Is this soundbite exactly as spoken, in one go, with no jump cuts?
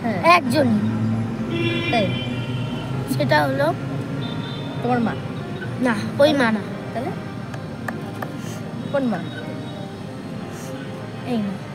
yes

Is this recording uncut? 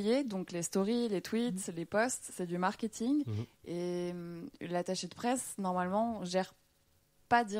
yes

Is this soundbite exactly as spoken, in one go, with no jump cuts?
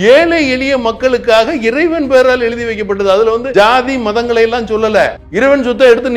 no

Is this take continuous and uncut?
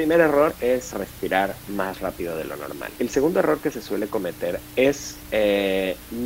no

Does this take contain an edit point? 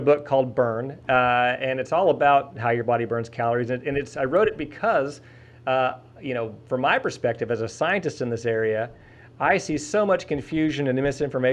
no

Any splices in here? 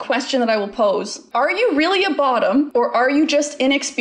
yes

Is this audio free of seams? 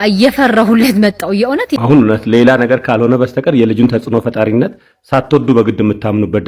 no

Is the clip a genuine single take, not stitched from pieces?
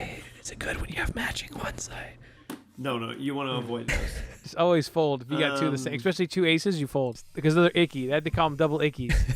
no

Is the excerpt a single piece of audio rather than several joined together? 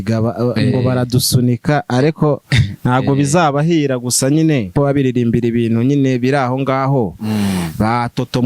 no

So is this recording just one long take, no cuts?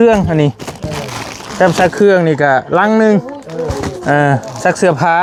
yes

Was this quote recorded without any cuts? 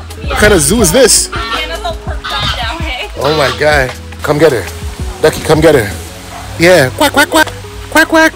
no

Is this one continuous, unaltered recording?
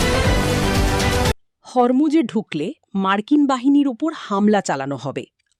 yes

